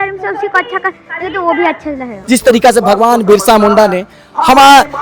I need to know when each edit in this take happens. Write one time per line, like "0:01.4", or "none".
0:02.1